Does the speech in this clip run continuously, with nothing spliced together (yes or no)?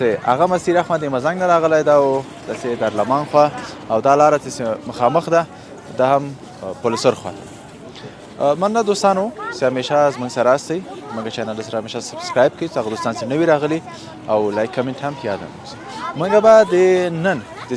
yes